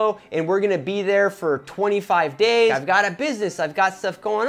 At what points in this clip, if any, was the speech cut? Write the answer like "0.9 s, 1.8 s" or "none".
2.8 s